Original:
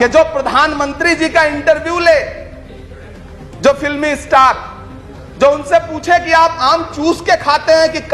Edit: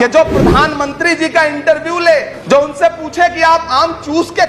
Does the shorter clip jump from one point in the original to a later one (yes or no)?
yes